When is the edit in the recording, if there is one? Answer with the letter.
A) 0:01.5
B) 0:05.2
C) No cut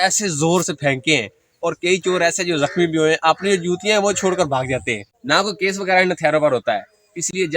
B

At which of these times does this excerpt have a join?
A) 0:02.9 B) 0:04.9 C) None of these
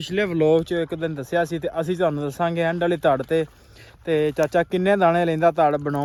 C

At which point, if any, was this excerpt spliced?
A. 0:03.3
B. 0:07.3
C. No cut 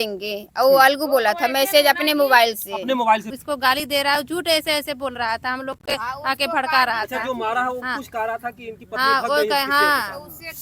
A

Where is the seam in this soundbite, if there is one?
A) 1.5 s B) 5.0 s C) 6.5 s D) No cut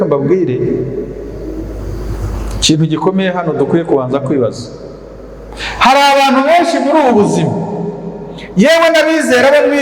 D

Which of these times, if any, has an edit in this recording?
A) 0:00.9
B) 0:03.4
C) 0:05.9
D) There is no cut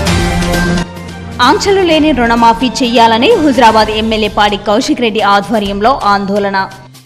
A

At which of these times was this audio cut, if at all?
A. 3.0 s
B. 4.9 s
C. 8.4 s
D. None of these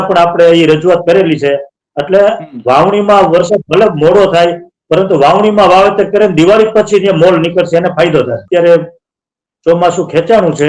C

